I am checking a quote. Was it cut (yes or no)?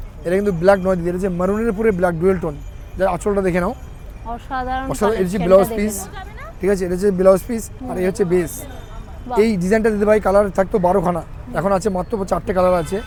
no